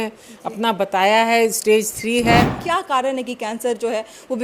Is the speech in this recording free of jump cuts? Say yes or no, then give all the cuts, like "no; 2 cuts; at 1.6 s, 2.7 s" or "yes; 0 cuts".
no; 1 cut; at 2.6 s